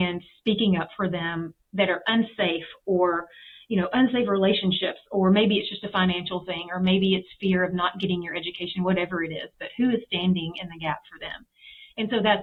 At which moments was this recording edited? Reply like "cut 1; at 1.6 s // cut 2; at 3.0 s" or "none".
none